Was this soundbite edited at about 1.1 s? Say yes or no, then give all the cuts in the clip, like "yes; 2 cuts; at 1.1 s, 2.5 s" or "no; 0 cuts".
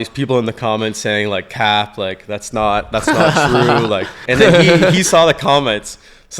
no; 1 cut; at 4.2 s